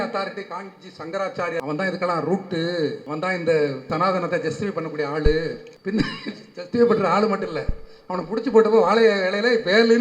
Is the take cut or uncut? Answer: cut